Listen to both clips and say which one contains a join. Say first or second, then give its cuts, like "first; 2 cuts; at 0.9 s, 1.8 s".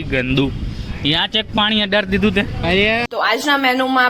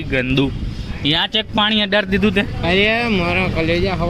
first; 1 cut; at 3.0 s